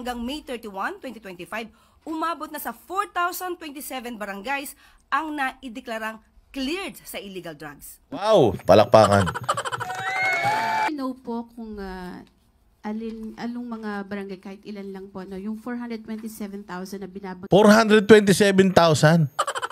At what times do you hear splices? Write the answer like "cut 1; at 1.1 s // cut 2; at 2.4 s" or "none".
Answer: cut 1; at 10.9 s